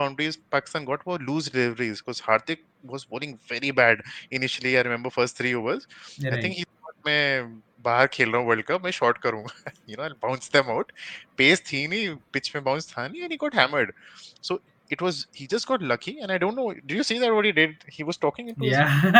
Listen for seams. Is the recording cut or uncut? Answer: uncut